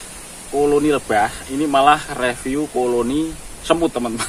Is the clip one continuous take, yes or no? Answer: yes